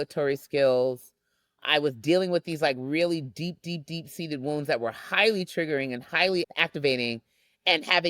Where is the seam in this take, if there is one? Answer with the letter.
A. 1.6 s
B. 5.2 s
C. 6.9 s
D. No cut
A